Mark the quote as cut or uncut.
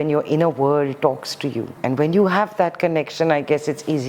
cut